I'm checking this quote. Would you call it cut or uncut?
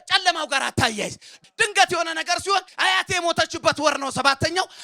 cut